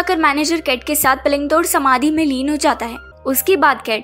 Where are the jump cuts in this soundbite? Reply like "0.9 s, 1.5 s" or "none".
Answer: 3.1 s